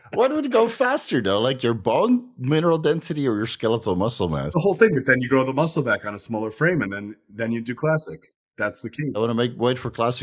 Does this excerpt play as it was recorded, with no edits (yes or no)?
yes